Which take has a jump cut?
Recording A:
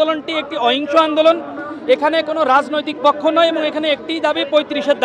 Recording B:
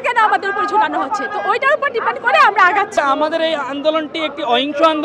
B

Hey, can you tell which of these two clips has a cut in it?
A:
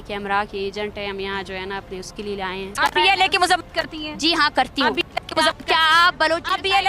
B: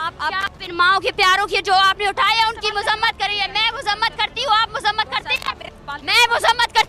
A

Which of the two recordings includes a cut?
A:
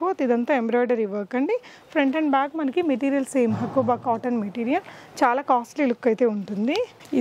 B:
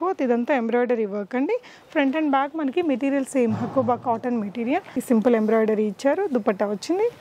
B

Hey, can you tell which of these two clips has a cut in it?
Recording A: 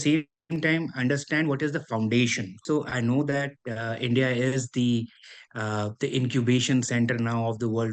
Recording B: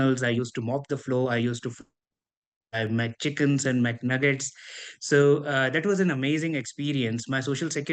A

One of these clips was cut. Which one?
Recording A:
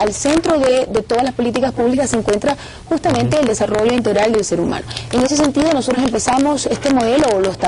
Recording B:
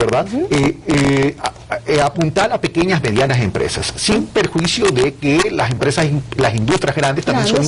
A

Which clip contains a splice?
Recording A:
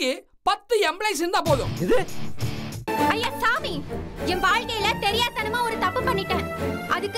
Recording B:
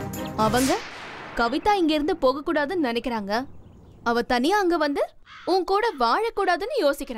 A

